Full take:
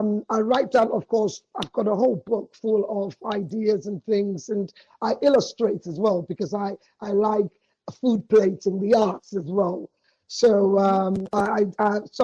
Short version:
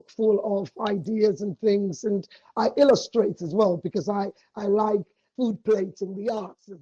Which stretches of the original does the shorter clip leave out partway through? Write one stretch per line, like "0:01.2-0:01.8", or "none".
0:07.6-0:07.8